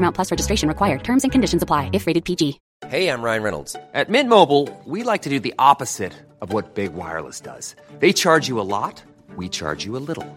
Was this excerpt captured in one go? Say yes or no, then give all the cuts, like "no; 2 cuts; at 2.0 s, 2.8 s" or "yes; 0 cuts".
no; 1 cut; at 2.7 s